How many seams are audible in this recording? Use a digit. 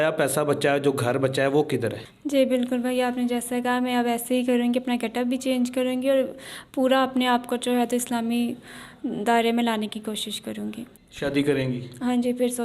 2